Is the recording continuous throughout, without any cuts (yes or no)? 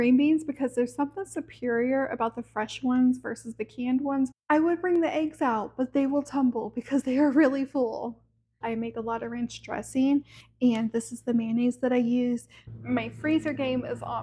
no